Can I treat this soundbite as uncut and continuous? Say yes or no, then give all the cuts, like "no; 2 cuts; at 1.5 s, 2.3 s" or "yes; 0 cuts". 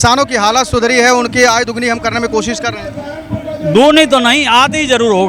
yes; 0 cuts